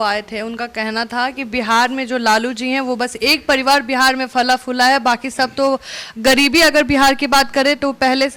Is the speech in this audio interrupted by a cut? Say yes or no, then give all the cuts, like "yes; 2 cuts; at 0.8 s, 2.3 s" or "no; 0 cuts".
no; 0 cuts